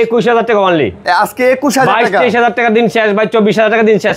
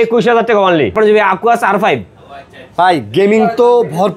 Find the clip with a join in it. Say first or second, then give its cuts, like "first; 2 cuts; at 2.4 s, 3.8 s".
second; 1 cut; at 0.9 s